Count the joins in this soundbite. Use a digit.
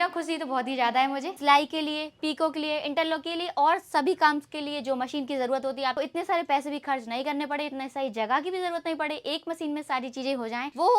2